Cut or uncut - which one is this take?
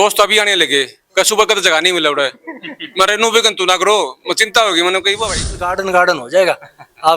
cut